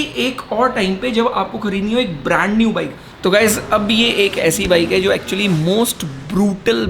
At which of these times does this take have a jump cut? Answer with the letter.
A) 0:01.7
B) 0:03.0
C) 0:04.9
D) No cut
B